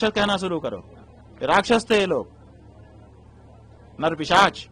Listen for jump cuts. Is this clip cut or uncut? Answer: uncut